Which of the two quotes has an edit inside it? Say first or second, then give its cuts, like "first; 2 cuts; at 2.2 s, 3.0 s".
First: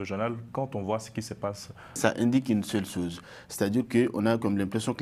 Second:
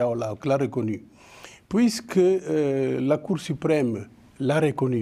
first; 1 cut; at 2.0 s